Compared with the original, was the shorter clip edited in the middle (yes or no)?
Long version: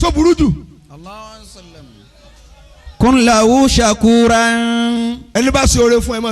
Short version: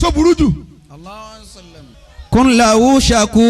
yes